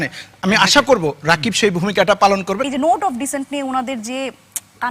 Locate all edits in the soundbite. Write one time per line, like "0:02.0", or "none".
0:02.6